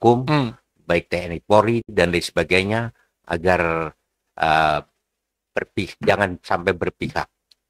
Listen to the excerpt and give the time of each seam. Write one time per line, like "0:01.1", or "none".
none